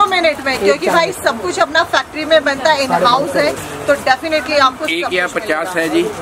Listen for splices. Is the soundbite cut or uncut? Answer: uncut